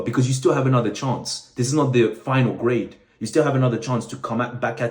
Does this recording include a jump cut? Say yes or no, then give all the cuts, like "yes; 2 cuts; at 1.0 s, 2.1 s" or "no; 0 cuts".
no; 0 cuts